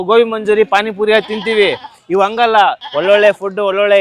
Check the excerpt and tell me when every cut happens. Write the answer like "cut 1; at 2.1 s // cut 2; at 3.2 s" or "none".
cut 1; at 2.9 s